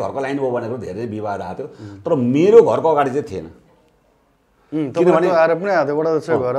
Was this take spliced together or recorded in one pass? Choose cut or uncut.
uncut